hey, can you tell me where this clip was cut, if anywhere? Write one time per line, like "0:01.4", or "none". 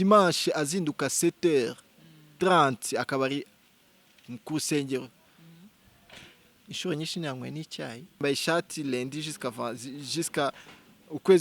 0:08.2